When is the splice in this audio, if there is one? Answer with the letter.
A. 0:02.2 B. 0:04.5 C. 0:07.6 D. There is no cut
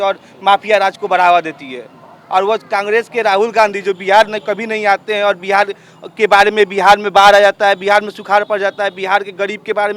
D